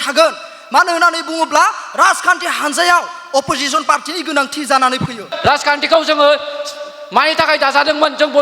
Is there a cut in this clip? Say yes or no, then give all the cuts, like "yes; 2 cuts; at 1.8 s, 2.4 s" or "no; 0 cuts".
yes; 1 cut; at 5.3 s